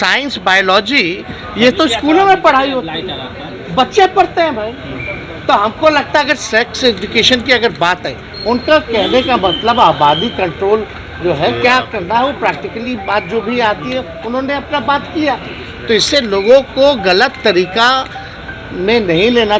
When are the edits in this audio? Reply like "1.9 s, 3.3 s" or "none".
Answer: none